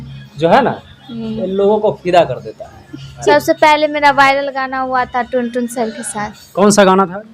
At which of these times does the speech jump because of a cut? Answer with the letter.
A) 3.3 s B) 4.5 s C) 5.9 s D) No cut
A